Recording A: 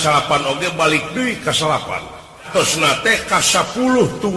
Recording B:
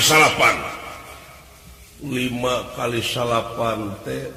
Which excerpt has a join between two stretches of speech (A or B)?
A